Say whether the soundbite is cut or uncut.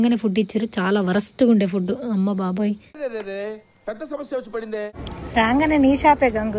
cut